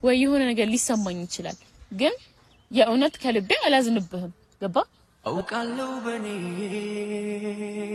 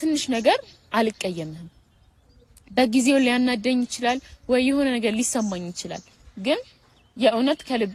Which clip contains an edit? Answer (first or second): second